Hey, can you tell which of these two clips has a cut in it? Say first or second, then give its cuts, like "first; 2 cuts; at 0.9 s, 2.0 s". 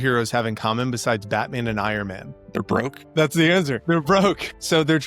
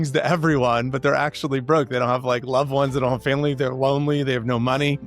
first; 1 cut; at 2.5 s